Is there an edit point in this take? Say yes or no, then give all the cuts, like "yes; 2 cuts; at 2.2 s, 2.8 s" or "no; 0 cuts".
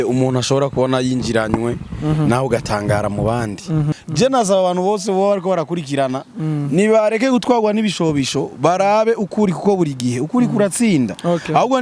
yes; 1 cut; at 3.9 s